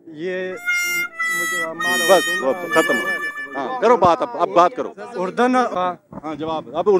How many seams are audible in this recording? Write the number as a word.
one